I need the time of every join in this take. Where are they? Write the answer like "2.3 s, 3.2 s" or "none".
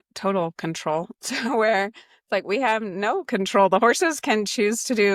none